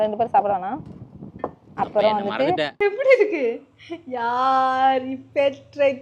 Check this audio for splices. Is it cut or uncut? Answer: cut